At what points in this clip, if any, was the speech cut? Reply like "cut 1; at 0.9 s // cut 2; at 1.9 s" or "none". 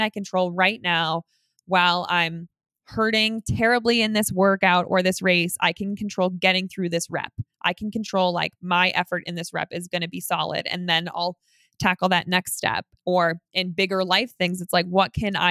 none